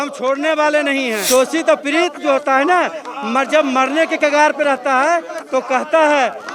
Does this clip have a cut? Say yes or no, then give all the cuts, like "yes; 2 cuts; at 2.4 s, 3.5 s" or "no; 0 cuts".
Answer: yes; 1 cut; at 1.3 s